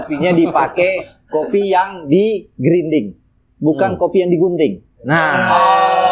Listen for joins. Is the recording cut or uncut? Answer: uncut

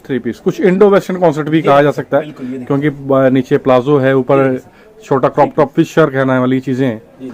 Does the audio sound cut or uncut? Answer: uncut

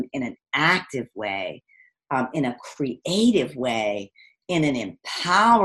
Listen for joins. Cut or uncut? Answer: uncut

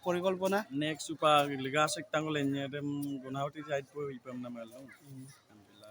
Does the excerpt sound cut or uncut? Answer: uncut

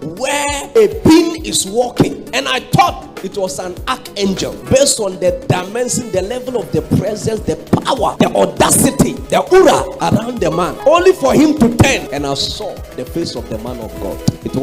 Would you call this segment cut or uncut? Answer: uncut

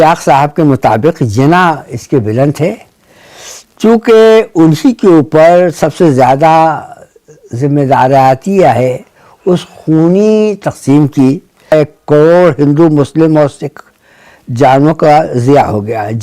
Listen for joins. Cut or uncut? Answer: cut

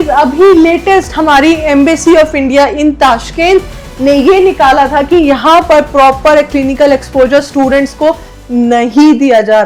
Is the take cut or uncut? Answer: uncut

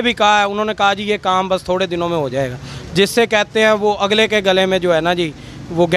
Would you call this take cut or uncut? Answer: uncut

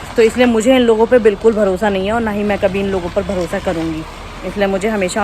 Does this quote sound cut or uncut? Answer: uncut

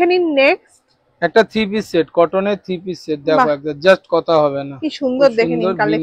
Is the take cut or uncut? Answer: uncut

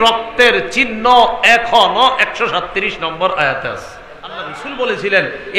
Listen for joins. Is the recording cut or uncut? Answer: cut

